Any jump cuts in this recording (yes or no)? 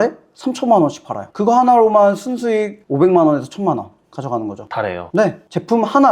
no